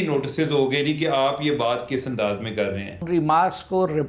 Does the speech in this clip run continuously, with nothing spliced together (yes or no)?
no